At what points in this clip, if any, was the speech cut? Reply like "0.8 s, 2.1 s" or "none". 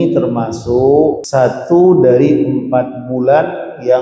1.2 s